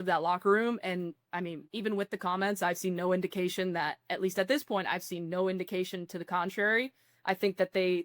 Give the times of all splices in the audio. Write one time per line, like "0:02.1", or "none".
0:01.6

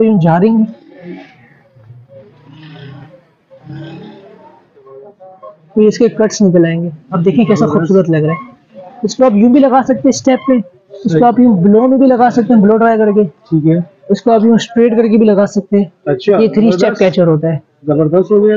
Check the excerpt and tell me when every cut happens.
none

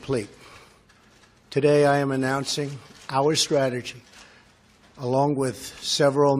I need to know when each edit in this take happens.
0:02.3

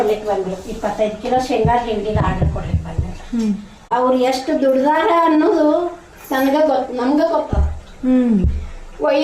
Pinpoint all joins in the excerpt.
0:03.8

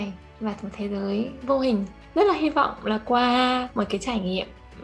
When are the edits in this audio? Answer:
0:02.0

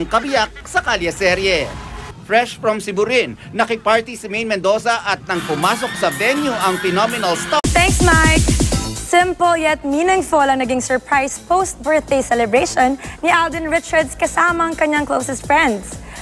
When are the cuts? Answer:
none

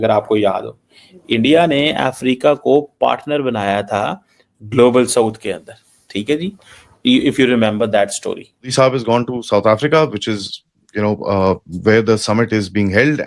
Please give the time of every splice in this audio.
0:08.7

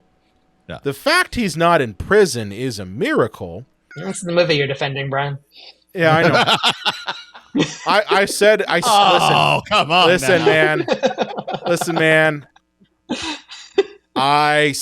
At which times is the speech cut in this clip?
0:04.3

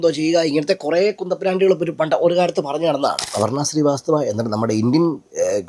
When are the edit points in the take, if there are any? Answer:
0:03.2

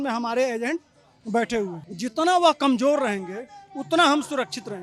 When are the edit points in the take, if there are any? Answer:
0:01.8

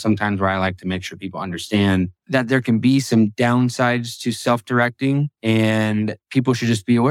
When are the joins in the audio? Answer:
0:02.2
0:03.3
0:05.3
0:06.2

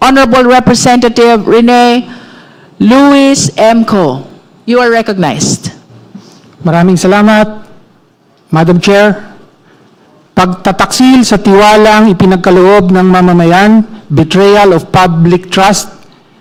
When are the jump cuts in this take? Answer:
none

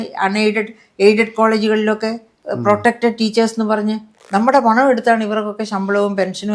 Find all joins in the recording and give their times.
0:04.2

